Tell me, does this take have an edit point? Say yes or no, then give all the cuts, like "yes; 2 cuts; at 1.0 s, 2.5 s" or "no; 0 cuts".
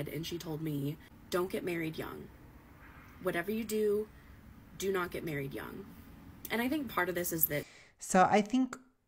no; 0 cuts